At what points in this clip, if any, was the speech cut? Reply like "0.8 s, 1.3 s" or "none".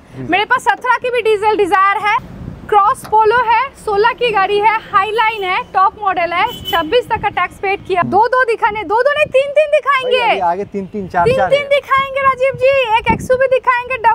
2.2 s, 8.0 s